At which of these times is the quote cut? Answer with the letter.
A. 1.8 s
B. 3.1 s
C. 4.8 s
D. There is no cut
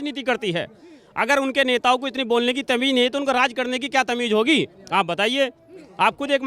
D